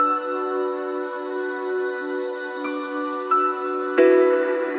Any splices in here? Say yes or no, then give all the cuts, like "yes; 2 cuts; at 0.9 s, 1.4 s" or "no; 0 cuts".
no; 0 cuts